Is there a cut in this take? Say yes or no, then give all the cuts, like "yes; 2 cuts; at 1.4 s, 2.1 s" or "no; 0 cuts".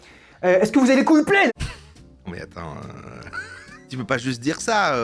yes; 2 cuts; at 1.5 s, 3.8 s